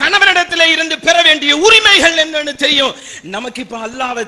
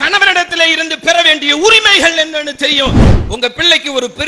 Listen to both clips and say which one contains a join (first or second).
second